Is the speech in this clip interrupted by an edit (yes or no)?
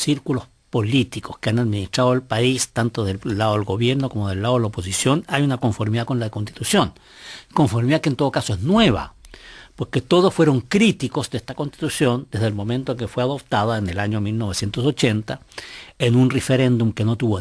yes